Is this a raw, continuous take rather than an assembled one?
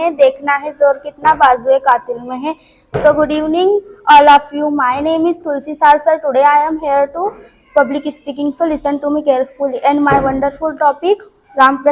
yes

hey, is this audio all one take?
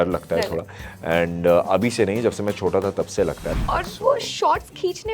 no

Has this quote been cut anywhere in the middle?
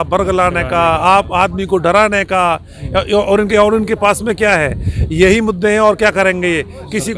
no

